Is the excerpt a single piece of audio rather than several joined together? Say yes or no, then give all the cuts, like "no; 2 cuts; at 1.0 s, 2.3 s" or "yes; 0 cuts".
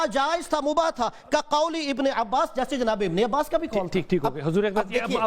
yes; 0 cuts